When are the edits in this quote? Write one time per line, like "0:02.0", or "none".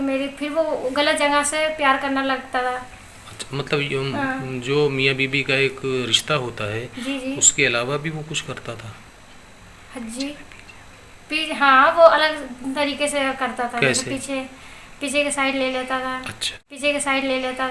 0:14.0
0:16.8

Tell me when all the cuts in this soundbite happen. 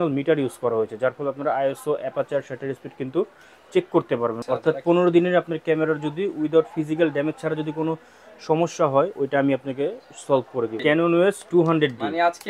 0:04.4
0:10.8

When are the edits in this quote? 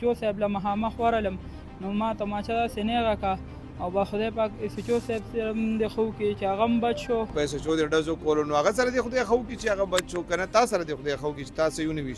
0:07.3

